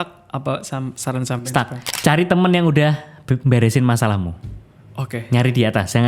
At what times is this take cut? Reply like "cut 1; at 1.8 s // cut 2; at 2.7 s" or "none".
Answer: cut 1; at 1.8 s